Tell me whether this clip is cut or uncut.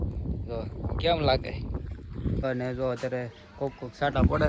cut